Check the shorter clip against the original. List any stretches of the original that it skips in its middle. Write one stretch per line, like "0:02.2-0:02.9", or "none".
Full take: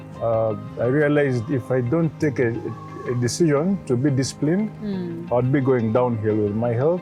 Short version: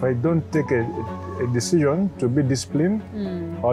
none